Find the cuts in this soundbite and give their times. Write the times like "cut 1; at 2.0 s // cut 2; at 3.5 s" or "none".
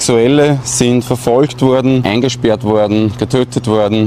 cut 1; at 2.0 s